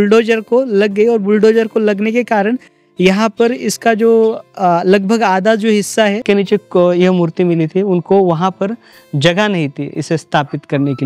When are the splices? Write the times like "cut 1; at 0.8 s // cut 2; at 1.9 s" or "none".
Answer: cut 1; at 6.2 s